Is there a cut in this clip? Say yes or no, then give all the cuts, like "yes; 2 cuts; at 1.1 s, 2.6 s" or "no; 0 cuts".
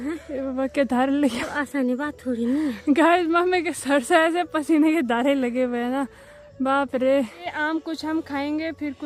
no; 0 cuts